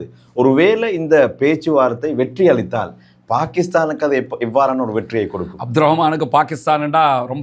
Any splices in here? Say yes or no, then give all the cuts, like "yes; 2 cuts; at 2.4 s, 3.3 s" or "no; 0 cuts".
no; 0 cuts